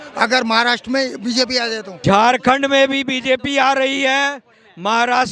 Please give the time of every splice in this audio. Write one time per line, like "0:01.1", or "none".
0:01.9